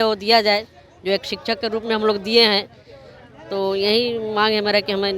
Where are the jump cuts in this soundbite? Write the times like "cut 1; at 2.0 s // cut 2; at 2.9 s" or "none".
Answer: none